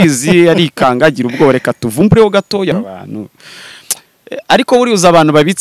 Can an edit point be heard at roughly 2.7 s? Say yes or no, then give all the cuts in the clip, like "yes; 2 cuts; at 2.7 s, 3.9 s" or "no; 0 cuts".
yes; 1 cut; at 2.7 s